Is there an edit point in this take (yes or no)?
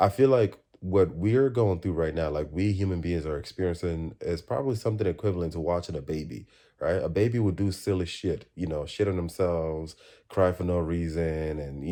no